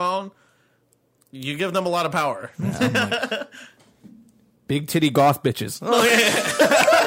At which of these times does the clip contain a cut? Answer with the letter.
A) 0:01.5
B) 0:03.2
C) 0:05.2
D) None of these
D